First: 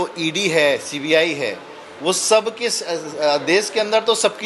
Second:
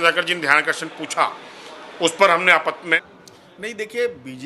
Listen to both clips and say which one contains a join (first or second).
second